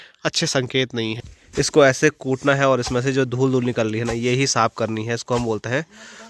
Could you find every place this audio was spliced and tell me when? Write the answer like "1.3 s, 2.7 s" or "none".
1.1 s

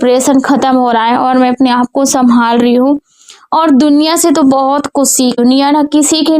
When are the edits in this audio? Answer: 5.4 s

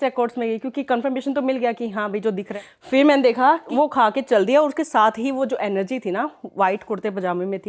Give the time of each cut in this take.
2.5 s, 3.7 s

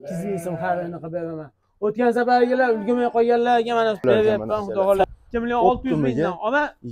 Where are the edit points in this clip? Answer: 5.0 s

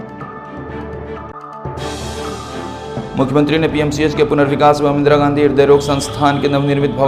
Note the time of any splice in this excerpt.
1.3 s, 2.7 s

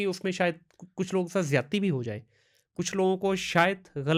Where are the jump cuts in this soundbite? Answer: none

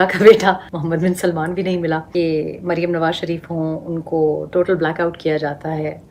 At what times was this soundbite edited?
2.1 s

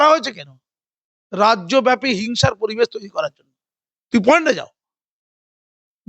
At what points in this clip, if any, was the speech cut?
none

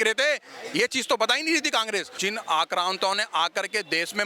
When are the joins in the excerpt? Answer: 2.2 s

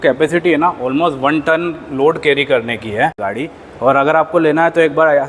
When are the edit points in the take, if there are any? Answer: 3.2 s

